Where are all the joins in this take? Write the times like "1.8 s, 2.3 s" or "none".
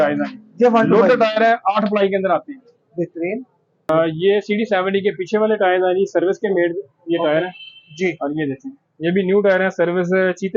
3.9 s